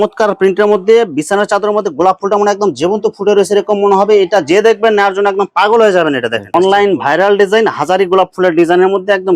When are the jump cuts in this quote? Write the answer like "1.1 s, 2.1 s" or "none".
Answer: 6.4 s